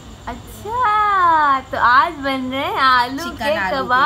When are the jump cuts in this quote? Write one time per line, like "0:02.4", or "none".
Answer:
none